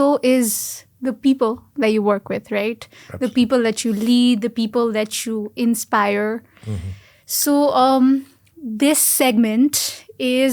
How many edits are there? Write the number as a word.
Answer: zero